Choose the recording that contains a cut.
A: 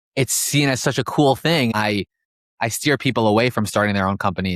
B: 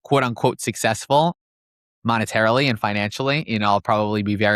A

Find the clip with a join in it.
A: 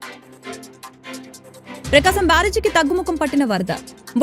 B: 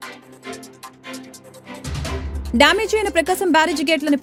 A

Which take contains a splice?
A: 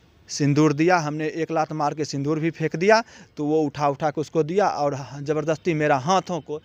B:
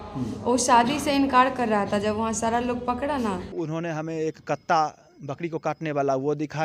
B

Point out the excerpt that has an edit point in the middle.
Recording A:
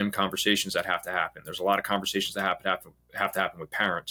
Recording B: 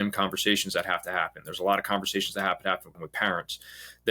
B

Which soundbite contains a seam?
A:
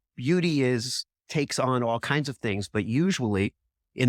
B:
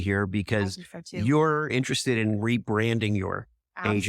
B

